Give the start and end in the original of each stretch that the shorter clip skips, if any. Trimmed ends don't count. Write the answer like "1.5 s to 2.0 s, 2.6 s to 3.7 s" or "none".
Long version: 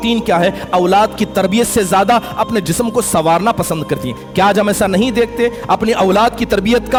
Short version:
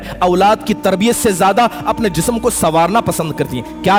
none